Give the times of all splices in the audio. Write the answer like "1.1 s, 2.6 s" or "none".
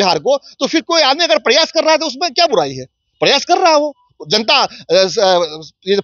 none